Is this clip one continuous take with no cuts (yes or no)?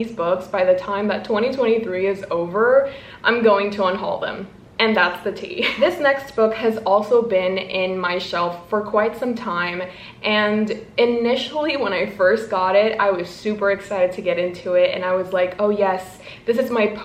yes